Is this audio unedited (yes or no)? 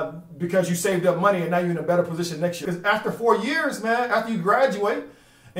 no